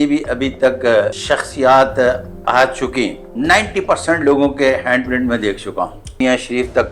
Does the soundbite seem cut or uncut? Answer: cut